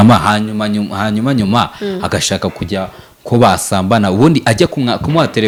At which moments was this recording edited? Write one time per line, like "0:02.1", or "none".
none